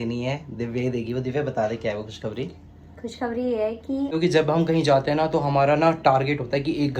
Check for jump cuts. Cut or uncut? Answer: cut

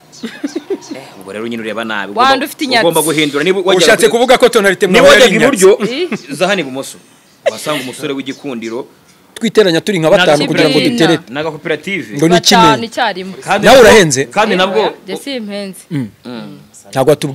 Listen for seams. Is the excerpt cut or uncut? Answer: cut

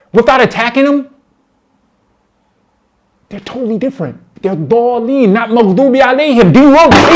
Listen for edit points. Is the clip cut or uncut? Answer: cut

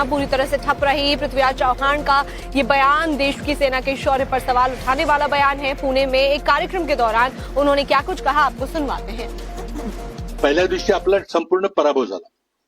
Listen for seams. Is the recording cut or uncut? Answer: cut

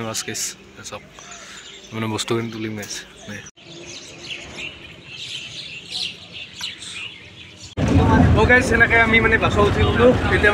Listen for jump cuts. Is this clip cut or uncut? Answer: uncut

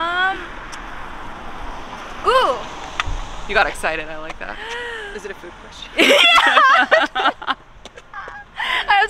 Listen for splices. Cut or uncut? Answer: uncut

